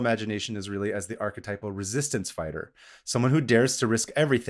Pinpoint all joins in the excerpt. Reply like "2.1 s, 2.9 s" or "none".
none